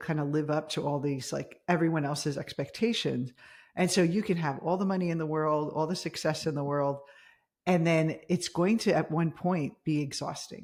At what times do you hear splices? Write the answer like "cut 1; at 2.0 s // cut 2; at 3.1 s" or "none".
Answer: none